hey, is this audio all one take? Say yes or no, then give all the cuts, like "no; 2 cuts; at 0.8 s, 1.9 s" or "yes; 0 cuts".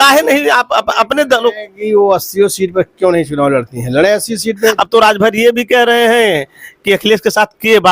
no; 1 cut; at 4.8 s